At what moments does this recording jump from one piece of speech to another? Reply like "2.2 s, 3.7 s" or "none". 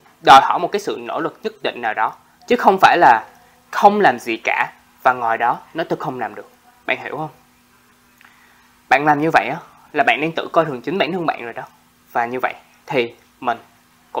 none